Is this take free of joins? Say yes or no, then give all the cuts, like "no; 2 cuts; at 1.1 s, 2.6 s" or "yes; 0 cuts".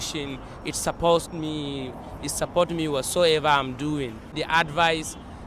no; 1 cut; at 4.4 s